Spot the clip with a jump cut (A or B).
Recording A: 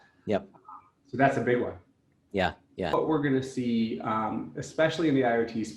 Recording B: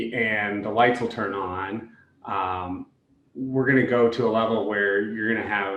A